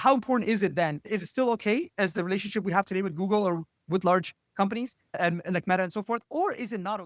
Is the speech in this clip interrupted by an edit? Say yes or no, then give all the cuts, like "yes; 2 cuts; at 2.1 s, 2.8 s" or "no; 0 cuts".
no; 0 cuts